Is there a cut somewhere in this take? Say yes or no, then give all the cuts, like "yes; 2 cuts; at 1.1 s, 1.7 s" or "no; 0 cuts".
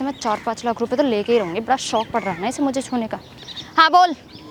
no; 0 cuts